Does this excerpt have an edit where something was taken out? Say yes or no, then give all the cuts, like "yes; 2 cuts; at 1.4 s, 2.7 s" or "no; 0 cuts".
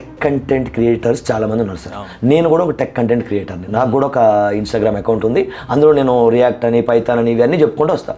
no; 0 cuts